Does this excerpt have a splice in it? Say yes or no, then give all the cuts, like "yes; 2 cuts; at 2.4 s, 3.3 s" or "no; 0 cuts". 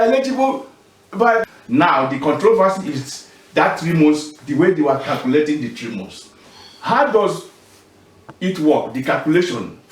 yes; 1 cut; at 1.5 s